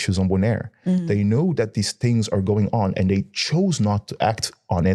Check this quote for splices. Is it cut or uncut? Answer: uncut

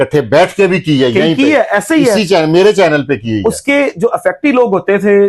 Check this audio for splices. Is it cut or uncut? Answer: uncut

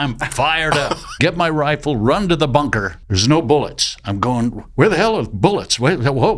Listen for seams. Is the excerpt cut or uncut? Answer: cut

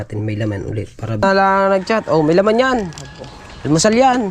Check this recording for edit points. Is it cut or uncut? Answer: cut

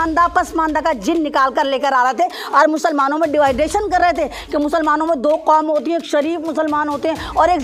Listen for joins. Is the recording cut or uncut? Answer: uncut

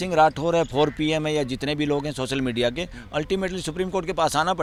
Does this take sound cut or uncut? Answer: uncut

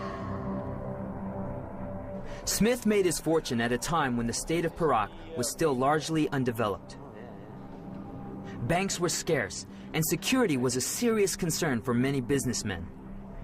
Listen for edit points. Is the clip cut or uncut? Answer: cut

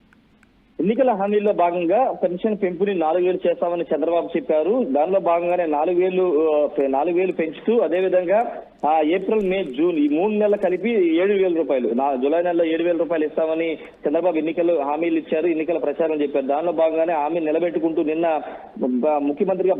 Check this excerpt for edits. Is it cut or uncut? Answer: uncut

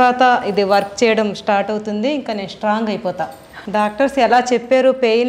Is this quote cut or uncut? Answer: cut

